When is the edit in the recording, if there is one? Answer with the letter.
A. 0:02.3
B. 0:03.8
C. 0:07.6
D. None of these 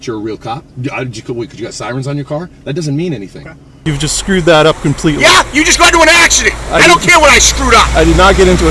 B